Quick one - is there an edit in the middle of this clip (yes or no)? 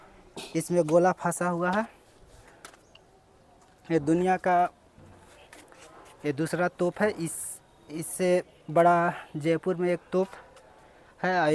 no